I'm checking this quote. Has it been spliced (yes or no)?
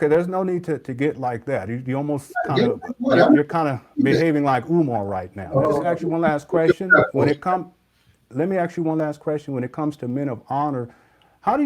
yes